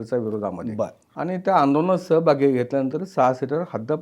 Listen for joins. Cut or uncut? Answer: cut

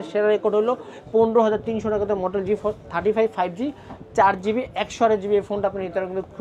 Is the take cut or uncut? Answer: uncut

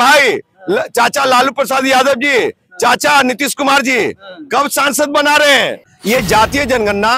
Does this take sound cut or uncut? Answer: cut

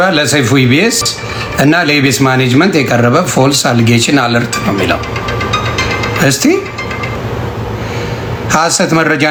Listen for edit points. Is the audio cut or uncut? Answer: uncut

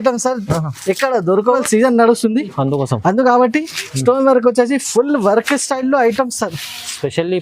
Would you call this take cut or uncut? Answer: cut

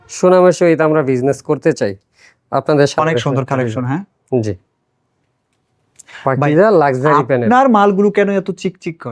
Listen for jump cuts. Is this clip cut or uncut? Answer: cut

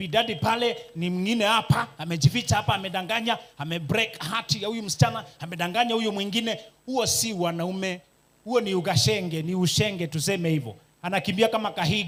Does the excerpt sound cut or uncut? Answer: uncut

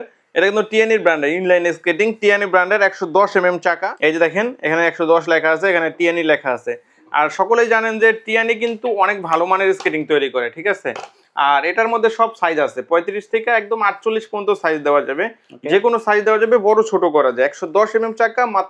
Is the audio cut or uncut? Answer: uncut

